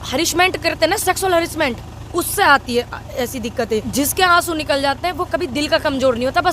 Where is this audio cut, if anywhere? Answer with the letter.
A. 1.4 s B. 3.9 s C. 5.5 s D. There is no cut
B